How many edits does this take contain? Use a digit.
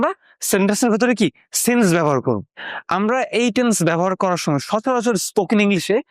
1